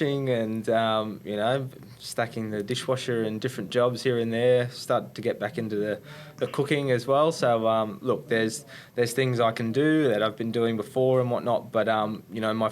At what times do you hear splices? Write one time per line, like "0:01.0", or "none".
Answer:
none